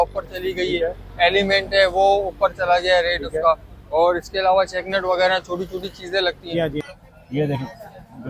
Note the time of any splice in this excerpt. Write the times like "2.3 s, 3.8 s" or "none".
6.9 s